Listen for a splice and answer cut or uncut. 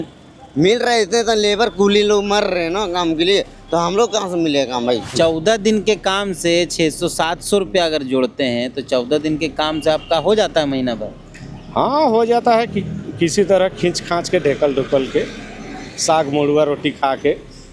cut